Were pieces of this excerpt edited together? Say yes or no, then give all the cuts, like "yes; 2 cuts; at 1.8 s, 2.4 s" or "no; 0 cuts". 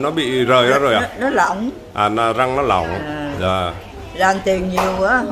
no; 0 cuts